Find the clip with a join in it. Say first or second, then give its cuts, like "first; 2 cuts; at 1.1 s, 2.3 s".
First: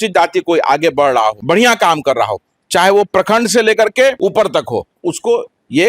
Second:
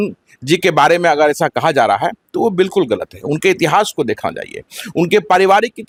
first; 2 cuts; at 1.4 s, 4.2 s